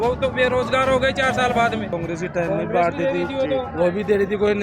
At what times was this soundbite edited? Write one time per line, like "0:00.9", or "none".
0:01.9